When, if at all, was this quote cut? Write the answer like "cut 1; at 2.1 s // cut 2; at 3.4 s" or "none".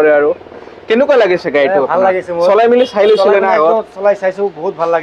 none